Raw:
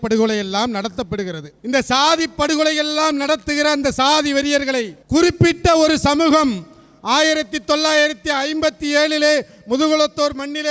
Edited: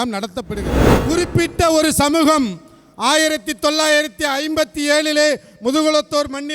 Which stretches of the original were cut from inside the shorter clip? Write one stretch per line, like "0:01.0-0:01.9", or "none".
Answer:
0:01.5-0:05.0